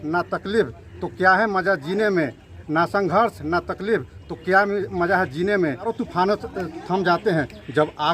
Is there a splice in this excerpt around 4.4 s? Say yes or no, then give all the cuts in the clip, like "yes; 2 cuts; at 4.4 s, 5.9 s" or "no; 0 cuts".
no; 1 cut; at 5.9 s